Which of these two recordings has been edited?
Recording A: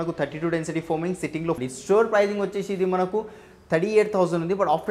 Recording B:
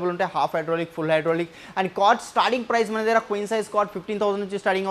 A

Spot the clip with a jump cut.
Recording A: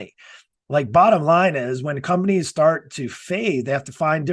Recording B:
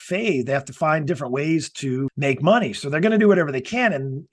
B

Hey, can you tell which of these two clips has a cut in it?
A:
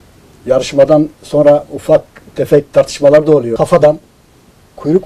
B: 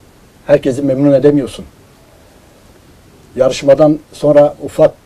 A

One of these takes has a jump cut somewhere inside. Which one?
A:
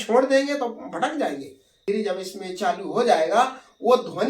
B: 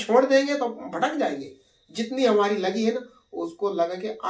A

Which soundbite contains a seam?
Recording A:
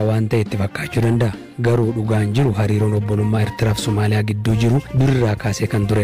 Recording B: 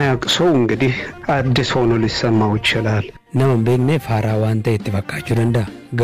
B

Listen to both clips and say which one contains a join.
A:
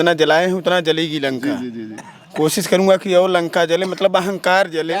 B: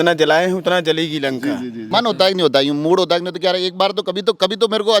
B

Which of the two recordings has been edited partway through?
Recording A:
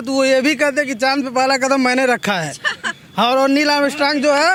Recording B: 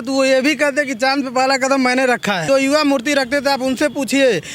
B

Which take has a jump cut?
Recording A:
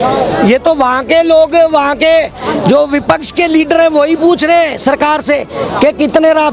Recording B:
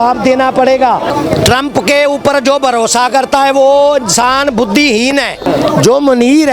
B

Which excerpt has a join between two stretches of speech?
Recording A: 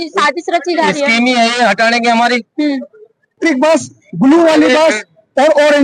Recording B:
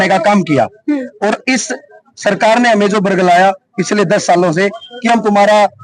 A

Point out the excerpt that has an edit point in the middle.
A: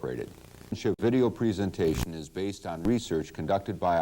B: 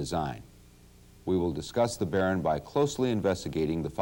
A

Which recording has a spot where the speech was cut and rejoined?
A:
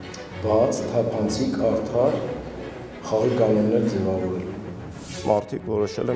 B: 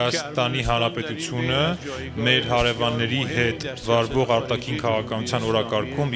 A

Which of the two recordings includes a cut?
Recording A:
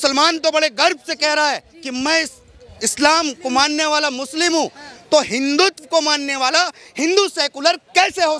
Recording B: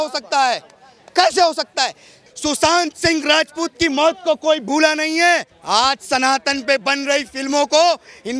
B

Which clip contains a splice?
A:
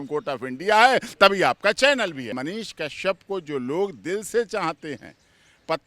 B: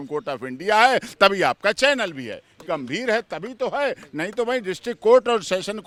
A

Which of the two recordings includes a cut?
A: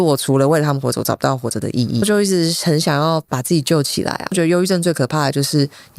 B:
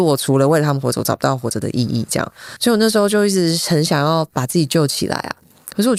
A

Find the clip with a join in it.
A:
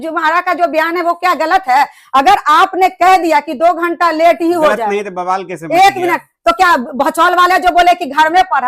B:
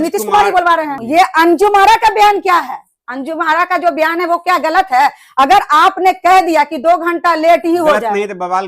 B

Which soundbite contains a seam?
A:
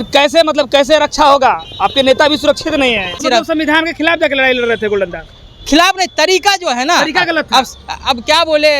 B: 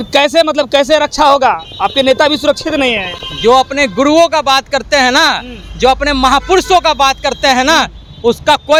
A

